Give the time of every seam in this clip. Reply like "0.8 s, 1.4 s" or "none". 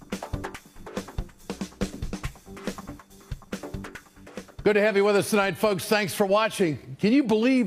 none